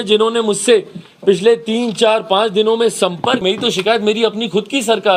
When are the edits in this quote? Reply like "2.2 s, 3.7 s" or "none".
3.4 s